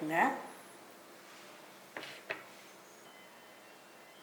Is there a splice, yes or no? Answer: yes